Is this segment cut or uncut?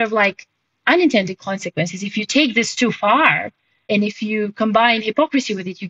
cut